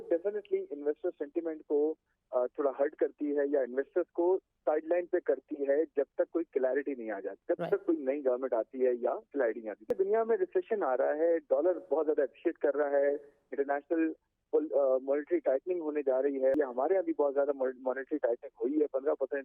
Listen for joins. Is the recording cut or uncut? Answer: cut